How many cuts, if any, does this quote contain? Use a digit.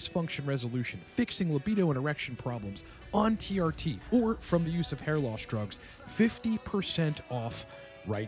0